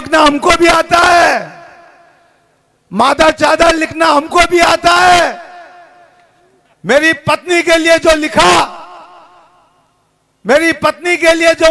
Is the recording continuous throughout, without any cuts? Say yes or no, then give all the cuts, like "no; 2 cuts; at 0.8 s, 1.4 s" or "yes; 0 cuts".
yes; 0 cuts